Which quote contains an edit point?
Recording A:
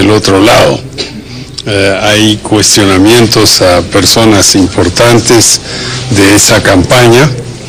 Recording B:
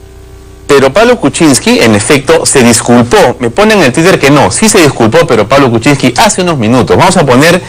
B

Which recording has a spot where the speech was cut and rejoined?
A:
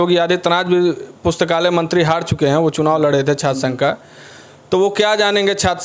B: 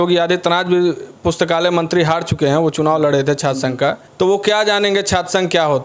B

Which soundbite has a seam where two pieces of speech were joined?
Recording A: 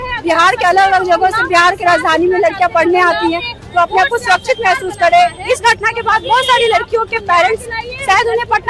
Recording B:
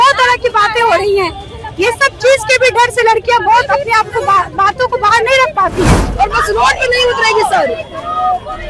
B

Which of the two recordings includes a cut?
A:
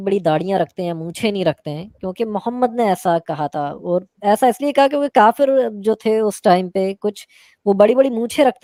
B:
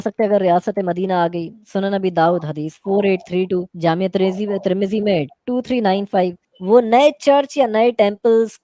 B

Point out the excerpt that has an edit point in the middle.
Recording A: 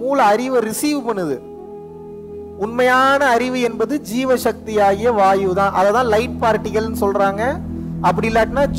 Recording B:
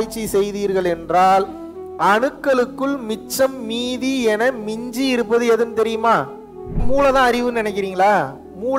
B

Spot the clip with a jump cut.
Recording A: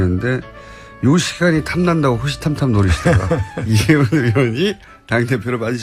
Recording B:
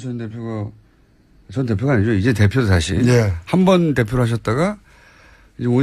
B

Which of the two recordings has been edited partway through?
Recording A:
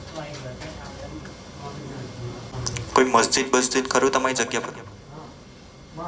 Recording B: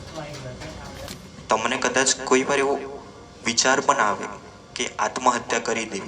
B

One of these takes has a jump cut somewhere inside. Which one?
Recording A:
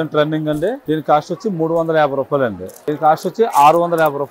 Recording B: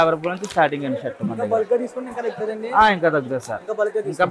A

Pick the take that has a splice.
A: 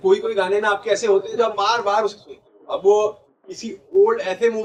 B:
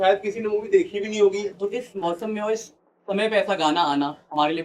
B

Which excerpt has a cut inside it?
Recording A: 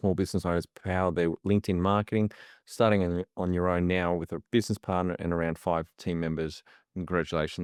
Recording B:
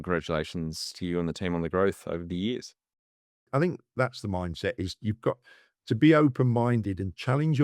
B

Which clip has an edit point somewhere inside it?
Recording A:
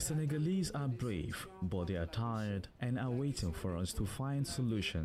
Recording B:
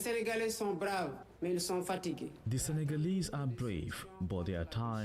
B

